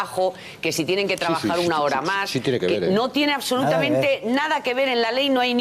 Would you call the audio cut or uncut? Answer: cut